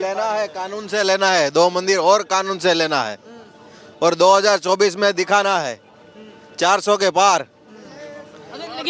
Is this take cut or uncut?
uncut